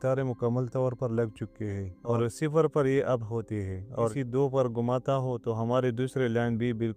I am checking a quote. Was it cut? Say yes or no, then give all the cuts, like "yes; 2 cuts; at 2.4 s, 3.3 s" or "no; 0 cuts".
yes; 2 cuts; at 2.1 s, 4.1 s